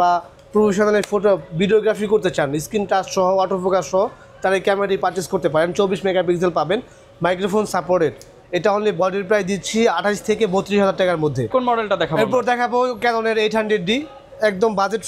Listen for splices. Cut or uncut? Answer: uncut